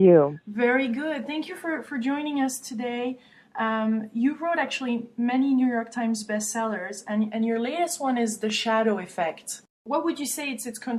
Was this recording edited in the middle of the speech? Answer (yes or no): no